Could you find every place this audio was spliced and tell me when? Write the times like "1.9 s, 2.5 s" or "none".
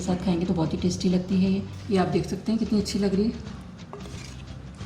1.7 s